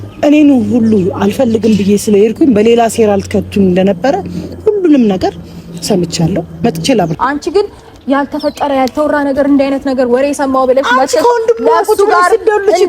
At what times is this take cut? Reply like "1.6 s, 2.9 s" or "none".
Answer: 7.1 s